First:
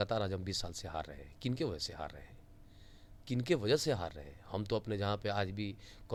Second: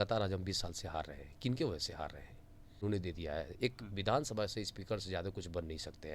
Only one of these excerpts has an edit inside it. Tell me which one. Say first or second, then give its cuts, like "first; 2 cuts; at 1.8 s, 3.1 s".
second; 1 cut; at 2.8 s